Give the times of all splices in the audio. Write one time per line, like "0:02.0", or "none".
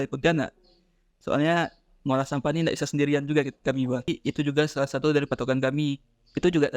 0:04.1